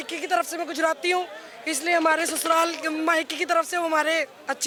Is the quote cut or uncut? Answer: uncut